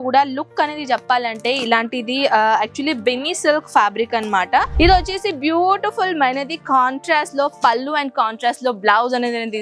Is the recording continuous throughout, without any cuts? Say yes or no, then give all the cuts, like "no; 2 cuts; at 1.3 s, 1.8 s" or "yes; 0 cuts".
no; 1 cut; at 4.7 s